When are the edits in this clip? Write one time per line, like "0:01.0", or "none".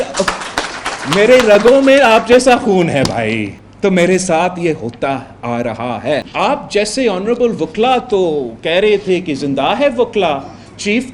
0:03.6
0:06.3